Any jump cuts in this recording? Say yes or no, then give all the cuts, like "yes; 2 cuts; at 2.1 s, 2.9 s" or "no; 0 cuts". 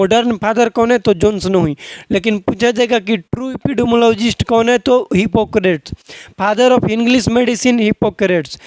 no; 0 cuts